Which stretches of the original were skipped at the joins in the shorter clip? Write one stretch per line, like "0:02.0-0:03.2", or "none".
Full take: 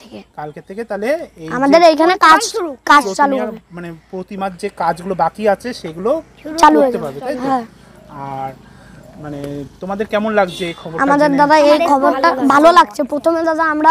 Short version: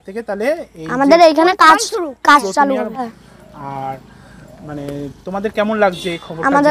0:03.6-0:07.6